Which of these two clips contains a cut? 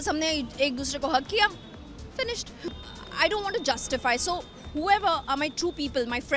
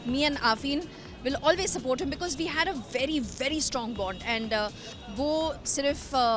first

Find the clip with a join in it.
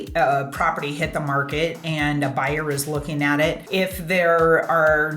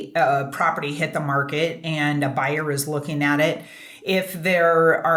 first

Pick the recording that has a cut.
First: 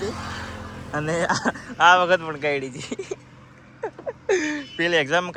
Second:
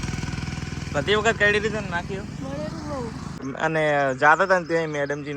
second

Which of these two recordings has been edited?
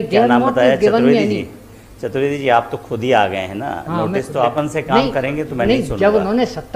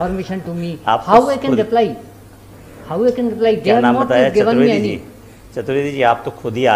first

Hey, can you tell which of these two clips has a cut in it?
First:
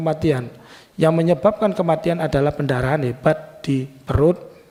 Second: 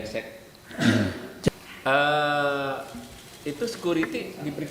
second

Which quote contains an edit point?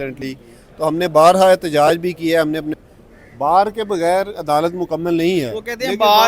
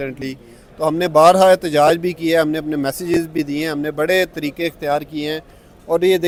first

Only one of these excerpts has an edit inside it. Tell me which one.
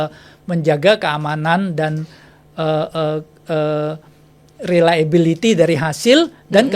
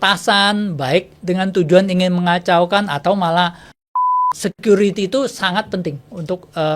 second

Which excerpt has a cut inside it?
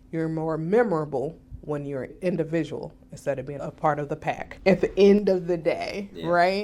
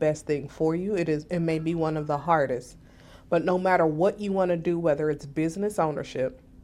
first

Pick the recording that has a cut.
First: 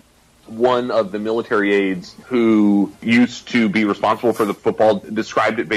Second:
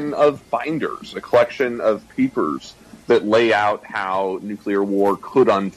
first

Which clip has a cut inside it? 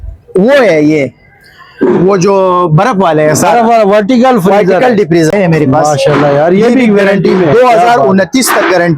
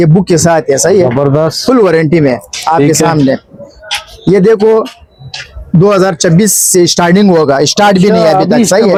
first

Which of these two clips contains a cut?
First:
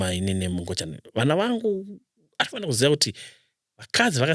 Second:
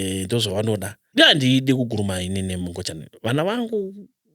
second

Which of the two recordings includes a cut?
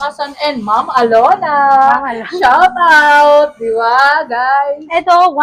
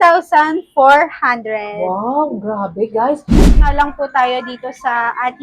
second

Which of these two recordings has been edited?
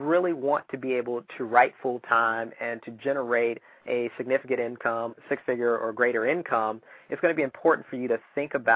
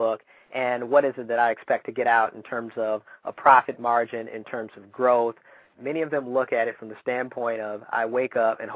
second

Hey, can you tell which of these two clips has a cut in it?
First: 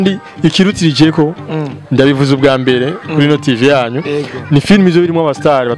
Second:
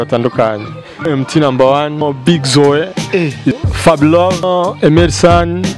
second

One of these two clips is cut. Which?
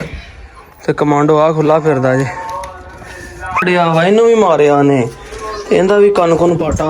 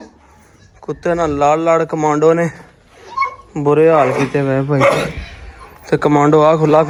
first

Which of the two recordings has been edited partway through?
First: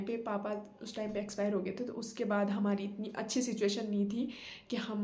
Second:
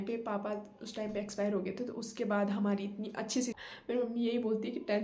second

